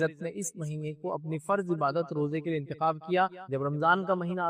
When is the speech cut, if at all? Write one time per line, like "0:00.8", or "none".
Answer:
0:03.4